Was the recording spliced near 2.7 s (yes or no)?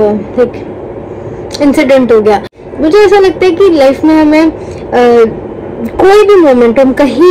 yes